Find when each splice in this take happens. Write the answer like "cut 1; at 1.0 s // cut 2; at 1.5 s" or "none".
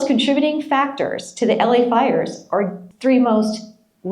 cut 1; at 2.8 s

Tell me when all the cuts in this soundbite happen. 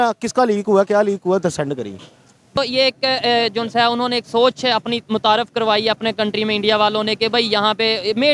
cut 1; at 2.6 s

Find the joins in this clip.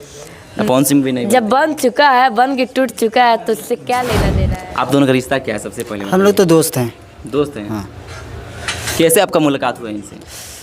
cut 1; at 4.1 s

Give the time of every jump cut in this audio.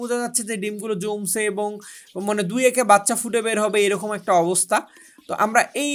none

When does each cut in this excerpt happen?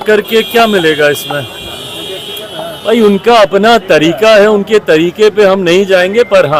none

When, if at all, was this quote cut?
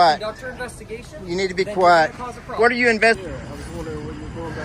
cut 1; at 3.2 s

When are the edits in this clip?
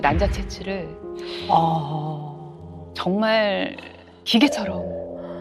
none

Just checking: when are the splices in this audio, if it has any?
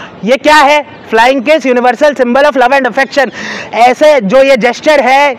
none

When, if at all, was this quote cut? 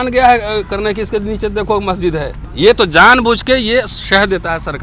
cut 1; at 2.4 s

